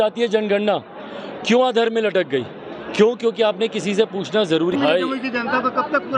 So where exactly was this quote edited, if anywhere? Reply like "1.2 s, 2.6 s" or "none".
4.7 s